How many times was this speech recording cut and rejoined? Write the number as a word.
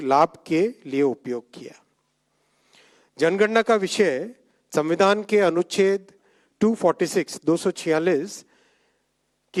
zero